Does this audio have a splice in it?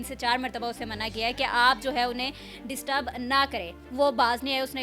yes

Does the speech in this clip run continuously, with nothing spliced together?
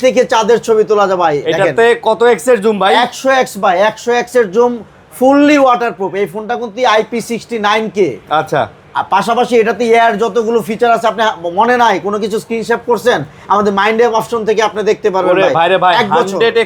yes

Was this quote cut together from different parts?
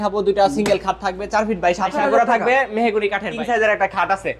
yes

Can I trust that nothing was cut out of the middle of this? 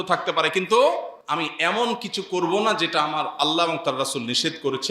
no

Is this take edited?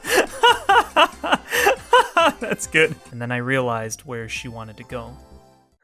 yes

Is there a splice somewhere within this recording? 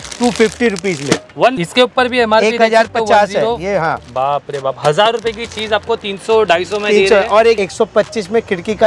yes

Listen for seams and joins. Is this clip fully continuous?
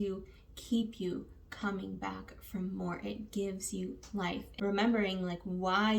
no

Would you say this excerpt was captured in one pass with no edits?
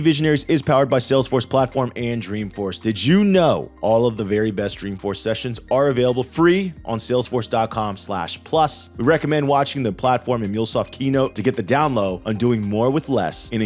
yes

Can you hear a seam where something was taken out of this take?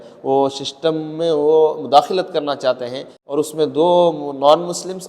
yes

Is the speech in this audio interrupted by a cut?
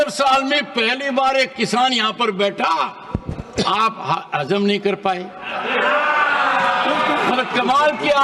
no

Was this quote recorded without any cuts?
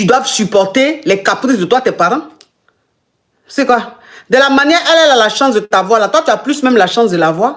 yes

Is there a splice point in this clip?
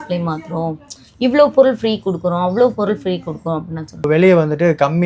yes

